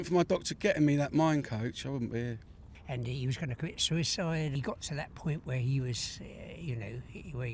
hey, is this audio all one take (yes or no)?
no